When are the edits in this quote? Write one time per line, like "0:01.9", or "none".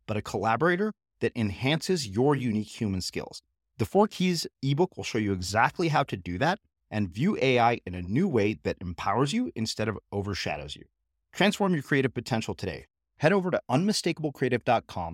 none

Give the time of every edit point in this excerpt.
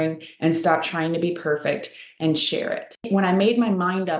0:03.1

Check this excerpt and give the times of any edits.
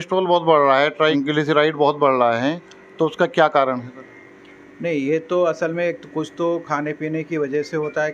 0:01.1

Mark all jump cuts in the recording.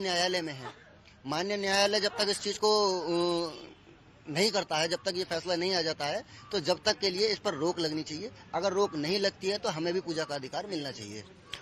0:09.4

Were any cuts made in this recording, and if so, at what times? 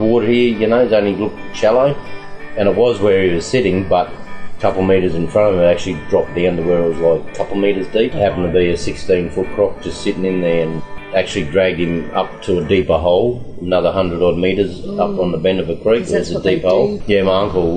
0:08.1
0:10.8
0:17.0

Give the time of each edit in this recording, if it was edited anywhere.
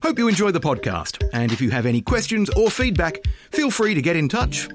none

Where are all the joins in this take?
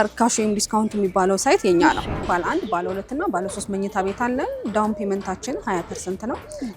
0:02.2

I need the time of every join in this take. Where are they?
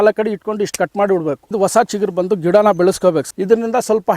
0:01.5
0:03.3

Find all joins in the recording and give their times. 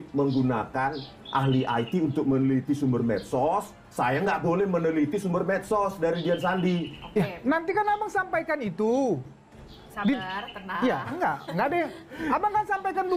none

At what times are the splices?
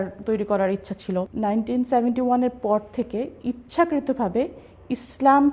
0:01.3

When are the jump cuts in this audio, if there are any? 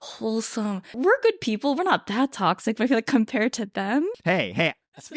0:01.0
0:04.2

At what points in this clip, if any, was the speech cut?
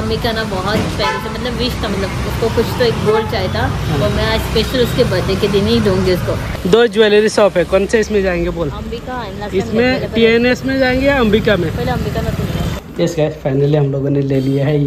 0:06.5
0:12.8

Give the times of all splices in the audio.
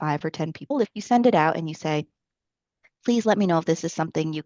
0:00.9

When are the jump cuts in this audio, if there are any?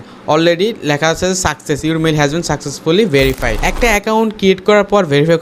0:03.6

